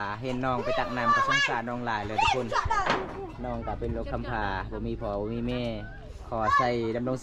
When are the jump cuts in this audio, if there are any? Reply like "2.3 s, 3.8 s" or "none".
none